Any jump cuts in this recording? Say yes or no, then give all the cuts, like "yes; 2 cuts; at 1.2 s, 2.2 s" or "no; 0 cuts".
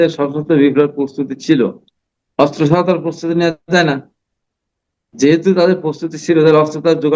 no; 0 cuts